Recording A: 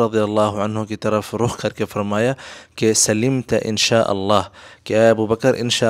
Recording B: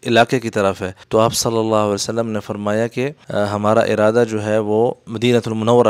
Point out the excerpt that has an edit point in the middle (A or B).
B